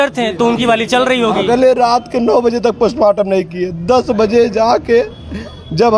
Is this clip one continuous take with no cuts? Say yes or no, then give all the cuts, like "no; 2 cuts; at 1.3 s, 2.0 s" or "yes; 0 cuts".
yes; 0 cuts